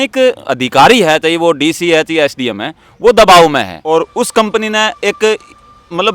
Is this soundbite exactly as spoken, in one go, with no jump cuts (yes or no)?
no